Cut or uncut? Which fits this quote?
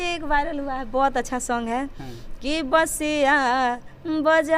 uncut